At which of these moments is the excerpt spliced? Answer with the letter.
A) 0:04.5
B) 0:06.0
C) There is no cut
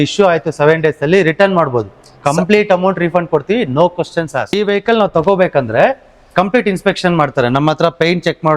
A